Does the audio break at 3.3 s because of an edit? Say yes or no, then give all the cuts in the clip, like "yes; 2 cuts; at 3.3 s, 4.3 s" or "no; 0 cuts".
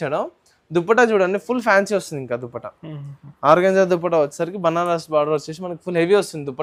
no; 0 cuts